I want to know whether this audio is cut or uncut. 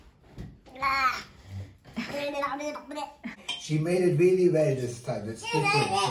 cut